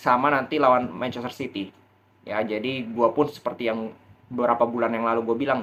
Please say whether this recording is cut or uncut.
uncut